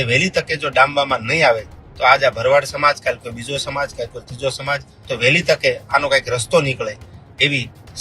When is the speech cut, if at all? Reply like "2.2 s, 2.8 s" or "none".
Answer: 4.9 s